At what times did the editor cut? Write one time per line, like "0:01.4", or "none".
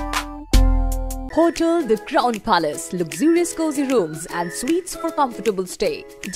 0:01.2